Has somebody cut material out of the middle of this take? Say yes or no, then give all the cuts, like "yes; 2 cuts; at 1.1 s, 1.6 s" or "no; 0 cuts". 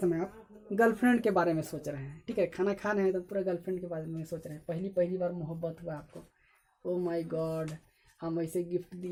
no; 0 cuts